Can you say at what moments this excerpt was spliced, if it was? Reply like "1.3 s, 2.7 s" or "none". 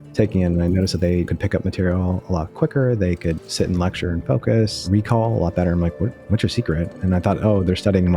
4.8 s

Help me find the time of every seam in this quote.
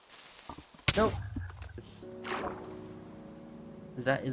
1.8 s

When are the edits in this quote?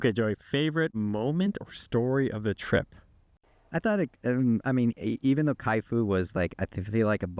0.9 s, 3.5 s

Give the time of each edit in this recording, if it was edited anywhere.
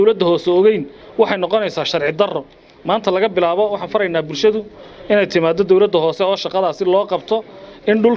none

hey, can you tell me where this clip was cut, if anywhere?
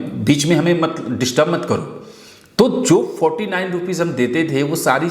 none

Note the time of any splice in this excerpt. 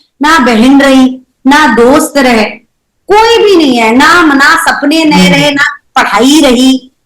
none

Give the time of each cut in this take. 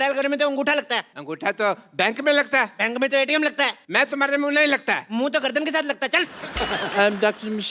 3.8 s, 6.4 s

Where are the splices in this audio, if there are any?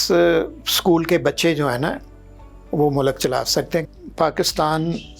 3.9 s

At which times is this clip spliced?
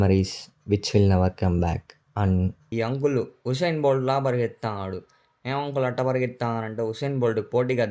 2.6 s

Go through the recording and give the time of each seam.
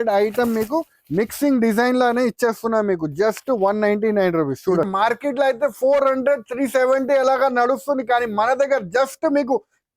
4.9 s

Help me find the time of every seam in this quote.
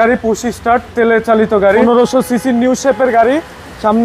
1.8 s

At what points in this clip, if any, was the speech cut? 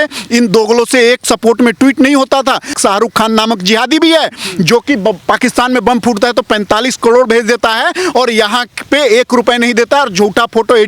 2.7 s

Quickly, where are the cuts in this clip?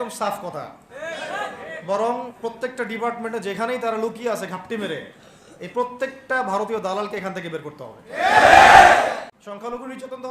9.3 s

